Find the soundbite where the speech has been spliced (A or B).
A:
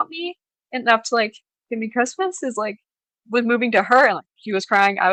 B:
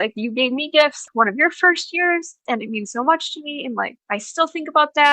B